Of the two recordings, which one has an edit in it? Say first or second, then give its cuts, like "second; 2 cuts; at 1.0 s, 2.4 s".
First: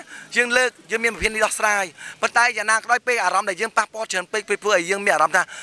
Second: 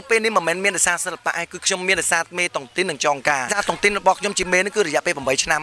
second; 1 cut; at 3.5 s